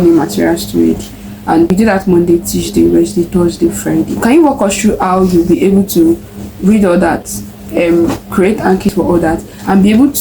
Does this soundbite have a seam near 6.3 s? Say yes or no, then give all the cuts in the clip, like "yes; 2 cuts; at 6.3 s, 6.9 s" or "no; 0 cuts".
no; 2 cuts; at 4.1 s, 8.9 s